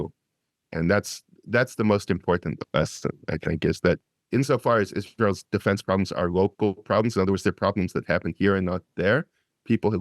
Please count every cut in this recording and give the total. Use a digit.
1